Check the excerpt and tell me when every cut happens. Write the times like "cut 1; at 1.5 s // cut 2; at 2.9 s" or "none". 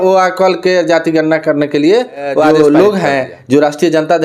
cut 1; at 2.5 s